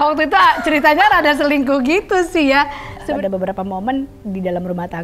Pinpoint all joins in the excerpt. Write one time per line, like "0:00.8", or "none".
0:03.0

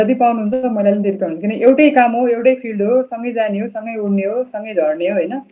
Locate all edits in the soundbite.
none

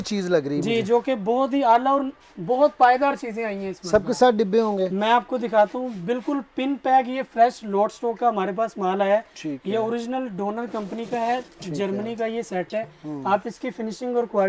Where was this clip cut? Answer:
none

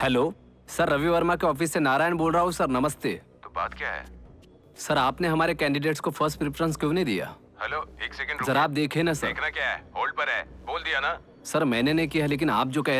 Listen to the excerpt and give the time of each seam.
none

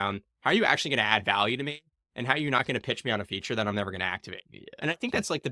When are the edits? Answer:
none

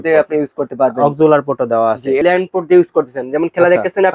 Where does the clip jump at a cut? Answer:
0:02.2

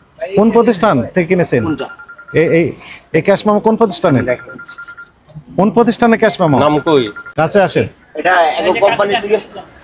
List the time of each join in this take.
none

